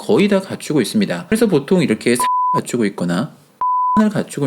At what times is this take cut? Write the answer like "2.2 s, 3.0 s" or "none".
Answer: 1.2 s